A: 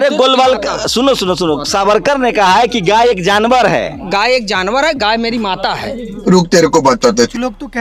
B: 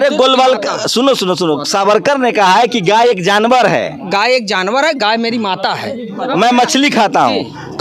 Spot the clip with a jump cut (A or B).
B